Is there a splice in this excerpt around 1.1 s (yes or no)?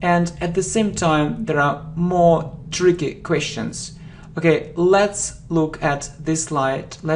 yes